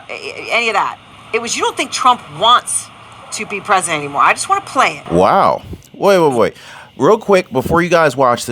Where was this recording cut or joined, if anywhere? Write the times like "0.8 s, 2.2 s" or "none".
5.0 s